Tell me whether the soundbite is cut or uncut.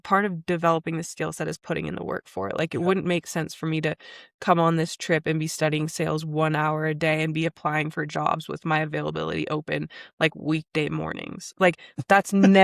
uncut